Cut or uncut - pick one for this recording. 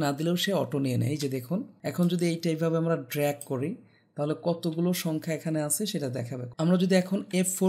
cut